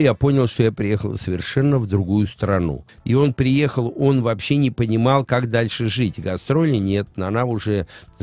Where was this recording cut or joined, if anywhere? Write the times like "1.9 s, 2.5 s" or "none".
2.9 s